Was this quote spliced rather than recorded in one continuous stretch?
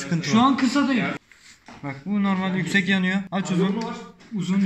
yes; 1 cut; at 1.2 s

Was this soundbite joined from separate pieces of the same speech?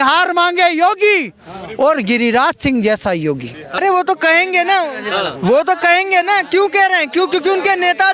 yes; 1 cut; at 3.8 s

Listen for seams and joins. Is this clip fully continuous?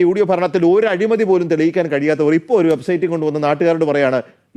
yes; 0 cuts

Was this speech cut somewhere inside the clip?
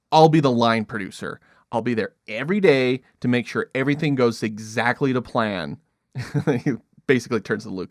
no; 0 cuts

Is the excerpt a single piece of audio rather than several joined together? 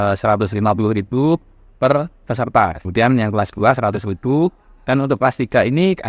no; 1 cut; at 2.8 s

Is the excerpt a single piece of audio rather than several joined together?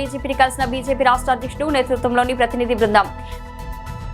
no; 1 cut; at 3.1 s

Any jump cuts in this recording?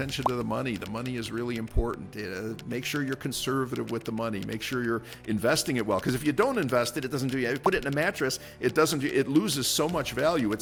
no; 0 cuts

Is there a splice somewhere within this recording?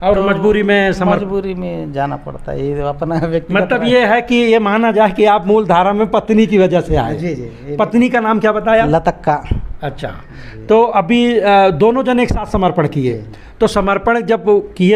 no; 0 cuts

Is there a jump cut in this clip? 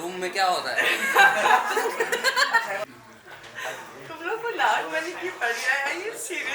yes; 1 cut; at 2.8 s

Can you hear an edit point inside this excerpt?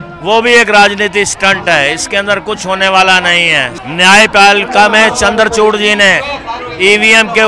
yes; 1 cut; at 3.7 s

